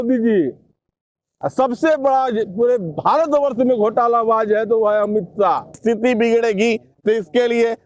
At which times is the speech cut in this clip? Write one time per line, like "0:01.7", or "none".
0:05.8